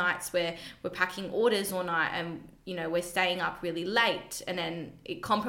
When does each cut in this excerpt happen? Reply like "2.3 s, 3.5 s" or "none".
none